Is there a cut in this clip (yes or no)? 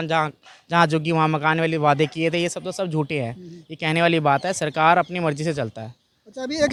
no